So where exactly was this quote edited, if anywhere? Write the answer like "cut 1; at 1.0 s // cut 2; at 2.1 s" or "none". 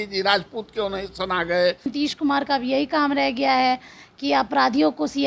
cut 1; at 1.9 s